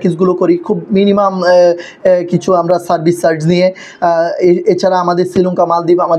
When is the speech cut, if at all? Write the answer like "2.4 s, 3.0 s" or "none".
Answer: none